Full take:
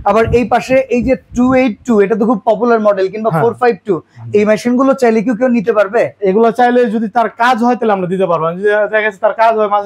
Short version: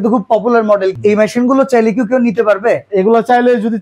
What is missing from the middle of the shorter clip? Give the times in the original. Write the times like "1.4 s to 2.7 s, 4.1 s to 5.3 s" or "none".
3.1 s to 4.3 s